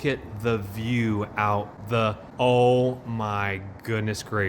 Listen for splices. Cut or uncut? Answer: cut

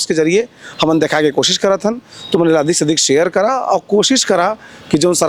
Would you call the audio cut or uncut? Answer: uncut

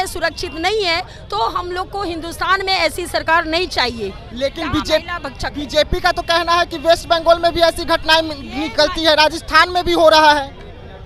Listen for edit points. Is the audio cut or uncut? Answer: uncut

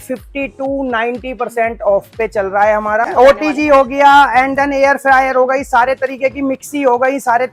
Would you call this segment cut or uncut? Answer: uncut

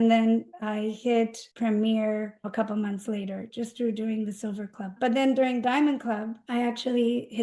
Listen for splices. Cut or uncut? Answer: cut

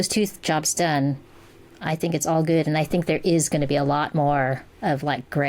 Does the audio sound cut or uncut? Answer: uncut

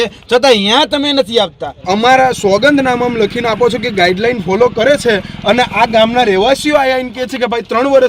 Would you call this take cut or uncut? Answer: cut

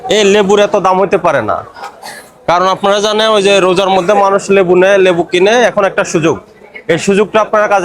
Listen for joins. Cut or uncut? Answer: uncut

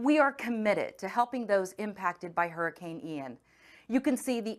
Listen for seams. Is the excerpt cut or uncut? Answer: uncut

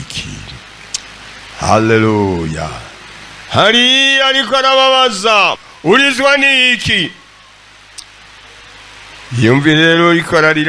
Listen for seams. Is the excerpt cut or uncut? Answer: cut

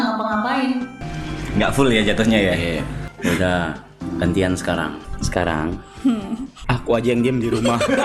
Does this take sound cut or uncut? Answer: cut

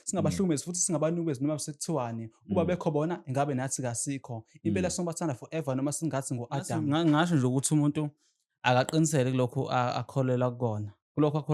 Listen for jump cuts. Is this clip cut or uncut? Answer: cut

